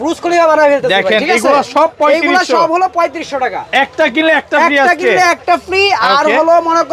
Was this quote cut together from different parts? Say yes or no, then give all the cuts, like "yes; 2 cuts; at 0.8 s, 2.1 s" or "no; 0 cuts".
no; 0 cuts